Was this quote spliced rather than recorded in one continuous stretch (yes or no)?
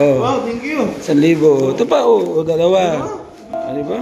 no